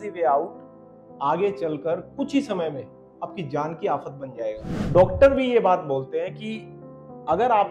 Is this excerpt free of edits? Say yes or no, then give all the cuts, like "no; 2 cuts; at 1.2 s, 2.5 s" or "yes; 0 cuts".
no; 1 cut; at 4.7 s